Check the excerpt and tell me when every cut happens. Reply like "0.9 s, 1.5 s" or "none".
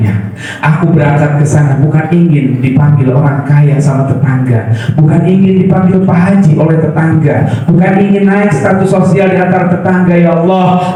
none